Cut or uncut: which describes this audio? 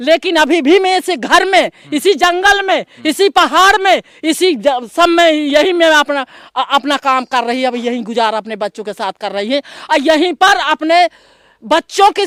uncut